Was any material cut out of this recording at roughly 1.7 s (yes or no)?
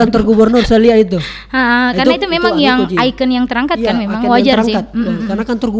no